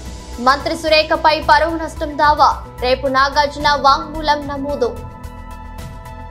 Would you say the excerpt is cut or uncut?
uncut